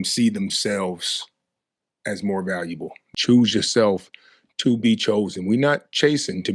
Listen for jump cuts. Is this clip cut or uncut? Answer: cut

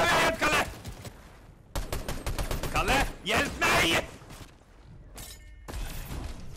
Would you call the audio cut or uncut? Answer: cut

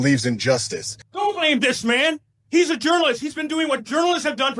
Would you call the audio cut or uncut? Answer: cut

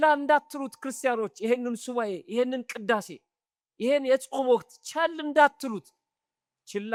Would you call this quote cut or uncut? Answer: uncut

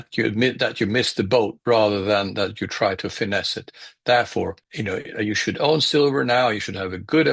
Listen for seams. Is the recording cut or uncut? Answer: uncut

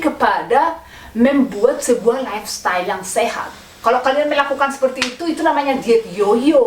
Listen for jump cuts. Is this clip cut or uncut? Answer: uncut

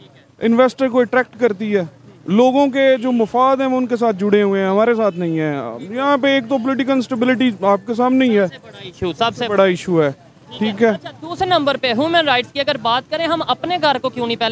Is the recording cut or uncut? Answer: uncut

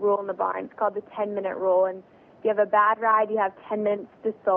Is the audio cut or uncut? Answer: uncut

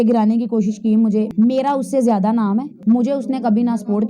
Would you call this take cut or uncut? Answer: cut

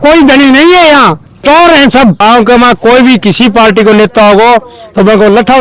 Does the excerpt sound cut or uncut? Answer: cut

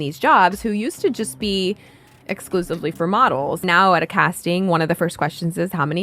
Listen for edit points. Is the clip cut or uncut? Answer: cut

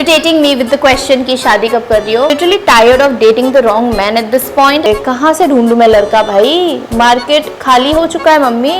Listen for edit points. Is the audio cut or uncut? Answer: cut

